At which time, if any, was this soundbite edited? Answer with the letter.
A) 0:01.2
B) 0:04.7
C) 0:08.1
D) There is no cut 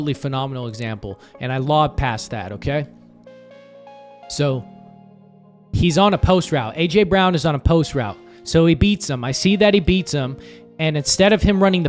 D